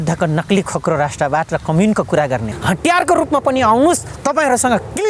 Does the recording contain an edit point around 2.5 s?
yes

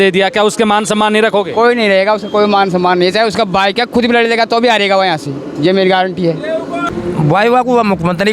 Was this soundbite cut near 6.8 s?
yes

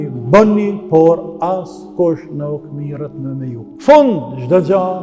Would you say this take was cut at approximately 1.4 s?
no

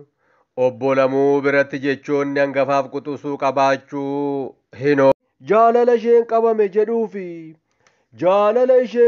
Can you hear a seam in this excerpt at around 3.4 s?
no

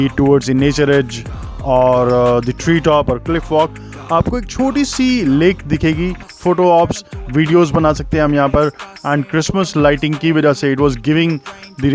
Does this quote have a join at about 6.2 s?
yes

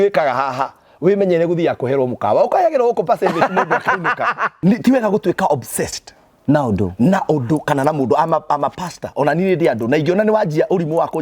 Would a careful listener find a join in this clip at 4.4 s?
yes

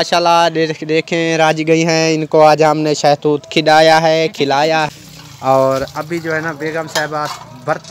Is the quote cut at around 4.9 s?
yes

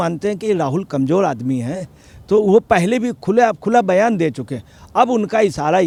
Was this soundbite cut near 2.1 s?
no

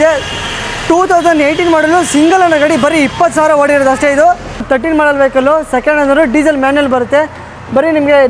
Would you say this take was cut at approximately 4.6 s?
yes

